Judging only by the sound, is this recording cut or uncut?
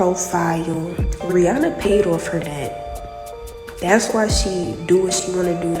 cut